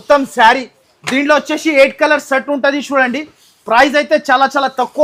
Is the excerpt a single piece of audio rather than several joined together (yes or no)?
yes